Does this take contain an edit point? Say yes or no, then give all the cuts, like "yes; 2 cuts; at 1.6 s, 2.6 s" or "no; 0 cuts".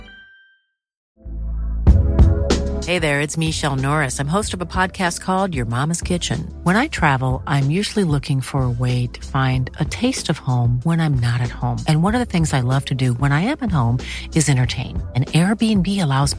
yes; 1 cut; at 1.0 s